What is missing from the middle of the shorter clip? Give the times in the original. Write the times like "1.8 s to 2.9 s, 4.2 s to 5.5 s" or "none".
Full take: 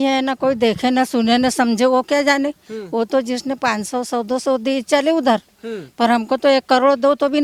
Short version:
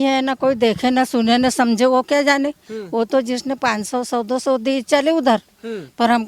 none